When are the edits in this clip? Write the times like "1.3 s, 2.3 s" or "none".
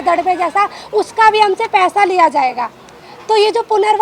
none